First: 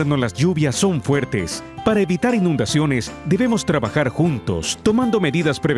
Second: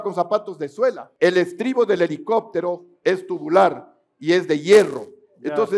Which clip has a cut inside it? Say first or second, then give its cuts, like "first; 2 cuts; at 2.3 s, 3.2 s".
second; 1 cut; at 1.1 s